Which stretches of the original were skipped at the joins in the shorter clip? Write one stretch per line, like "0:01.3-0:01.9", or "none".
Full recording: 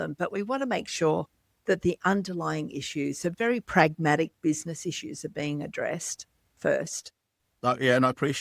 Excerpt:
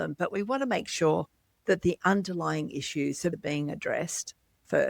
0:03.3-0:05.3